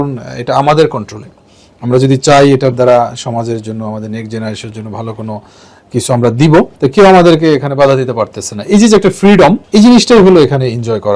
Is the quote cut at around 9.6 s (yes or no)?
yes